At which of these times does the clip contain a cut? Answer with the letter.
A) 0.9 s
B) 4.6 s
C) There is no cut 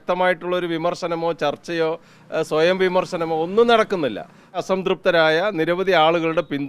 B